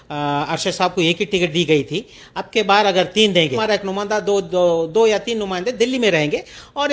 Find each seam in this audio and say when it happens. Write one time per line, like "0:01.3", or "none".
0:03.6